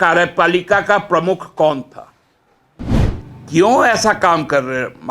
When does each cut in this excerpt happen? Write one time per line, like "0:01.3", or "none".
0:02.9

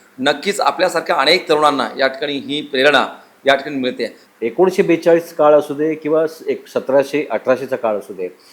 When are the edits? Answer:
0:04.1

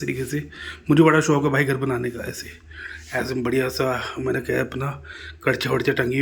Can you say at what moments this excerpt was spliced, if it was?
none

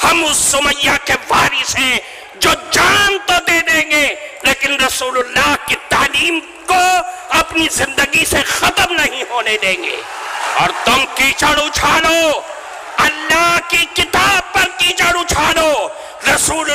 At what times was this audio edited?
0:10.5

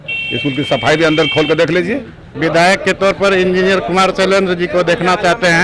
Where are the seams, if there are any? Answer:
0:02.2

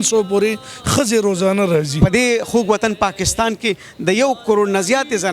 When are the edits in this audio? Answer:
0:02.0

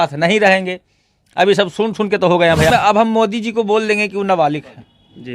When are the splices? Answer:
0:02.7

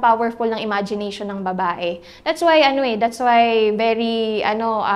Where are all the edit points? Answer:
none

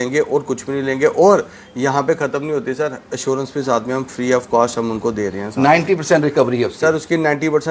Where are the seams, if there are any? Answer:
none

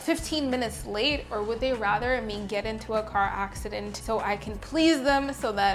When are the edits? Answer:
none

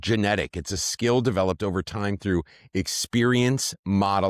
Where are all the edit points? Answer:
none

